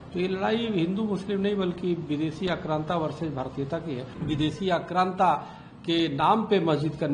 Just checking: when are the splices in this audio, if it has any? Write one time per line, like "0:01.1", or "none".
0:04.1